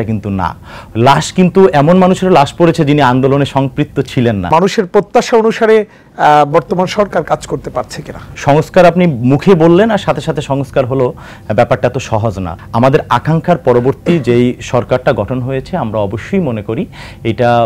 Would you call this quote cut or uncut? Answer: cut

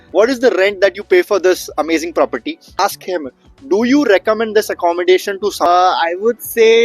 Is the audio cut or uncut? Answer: cut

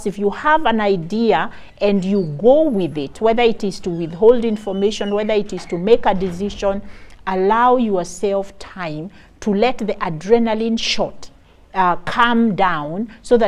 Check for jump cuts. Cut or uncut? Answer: uncut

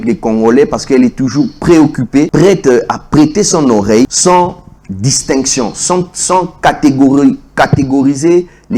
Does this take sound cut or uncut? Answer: cut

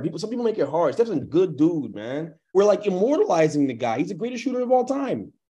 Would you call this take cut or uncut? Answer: cut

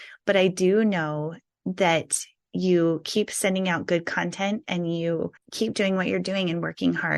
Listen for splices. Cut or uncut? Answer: cut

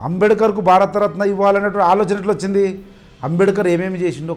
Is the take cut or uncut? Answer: uncut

